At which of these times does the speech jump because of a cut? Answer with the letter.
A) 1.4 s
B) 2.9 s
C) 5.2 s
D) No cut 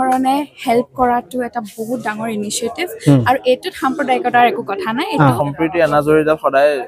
C